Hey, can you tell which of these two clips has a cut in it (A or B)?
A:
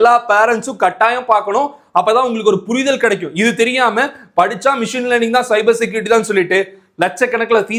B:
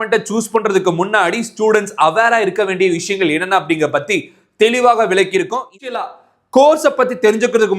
B